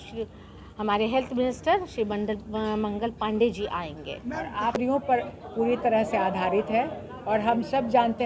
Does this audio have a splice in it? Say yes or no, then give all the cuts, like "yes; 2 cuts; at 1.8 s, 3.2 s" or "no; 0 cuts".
yes; 1 cut; at 4.8 s